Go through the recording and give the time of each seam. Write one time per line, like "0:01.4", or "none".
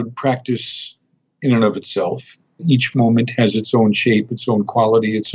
0:02.6